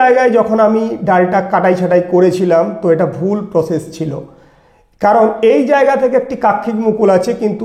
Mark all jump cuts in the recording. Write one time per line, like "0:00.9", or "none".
none